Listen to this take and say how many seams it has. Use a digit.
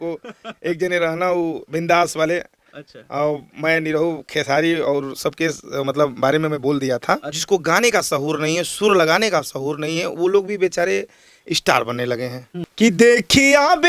2